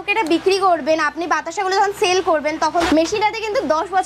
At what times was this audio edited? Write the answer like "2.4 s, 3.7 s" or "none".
2.9 s